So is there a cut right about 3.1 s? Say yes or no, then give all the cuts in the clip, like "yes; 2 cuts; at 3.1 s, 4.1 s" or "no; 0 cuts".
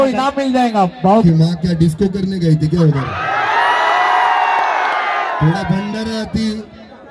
no; 1 cut; at 1.2 s